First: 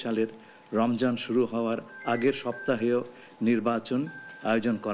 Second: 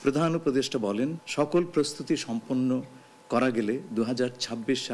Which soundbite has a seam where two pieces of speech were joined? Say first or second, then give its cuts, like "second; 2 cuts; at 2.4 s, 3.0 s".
second; 1 cut; at 1.2 s